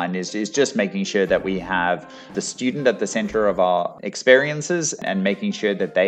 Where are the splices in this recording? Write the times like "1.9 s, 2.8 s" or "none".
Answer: 2.3 s, 4.0 s, 5.0 s

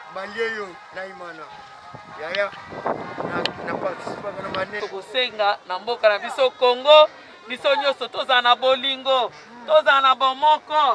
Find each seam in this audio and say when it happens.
4.8 s

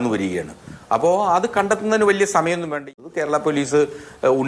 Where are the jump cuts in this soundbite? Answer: 2.8 s

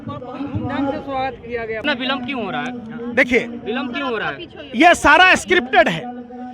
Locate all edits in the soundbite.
1.8 s

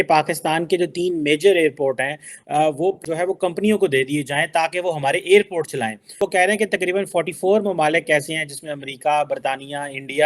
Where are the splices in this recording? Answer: 3.0 s, 6.0 s

